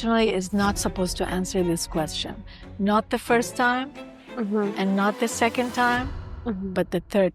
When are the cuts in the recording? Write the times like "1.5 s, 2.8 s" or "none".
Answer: none